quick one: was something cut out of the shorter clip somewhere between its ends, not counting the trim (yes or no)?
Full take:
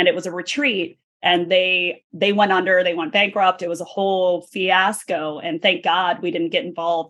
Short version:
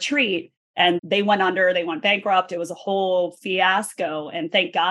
yes